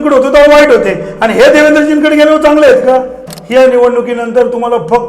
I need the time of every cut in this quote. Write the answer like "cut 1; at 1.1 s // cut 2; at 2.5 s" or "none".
cut 1; at 3.3 s